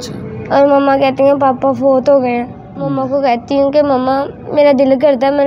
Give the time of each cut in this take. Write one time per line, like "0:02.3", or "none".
0:03.0